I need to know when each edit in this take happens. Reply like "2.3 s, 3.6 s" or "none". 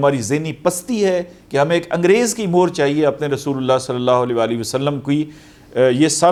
none

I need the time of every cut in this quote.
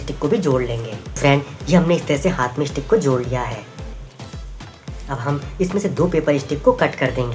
none

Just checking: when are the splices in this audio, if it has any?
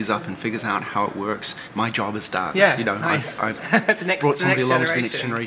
none

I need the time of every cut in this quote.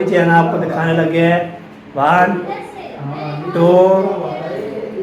none

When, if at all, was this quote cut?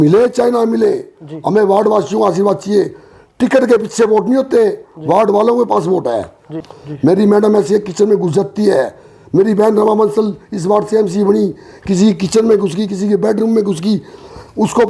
6.6 s

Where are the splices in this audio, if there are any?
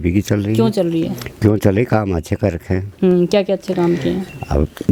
none

